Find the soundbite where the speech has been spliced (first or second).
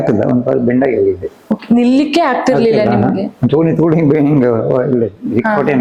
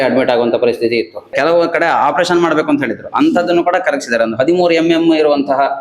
second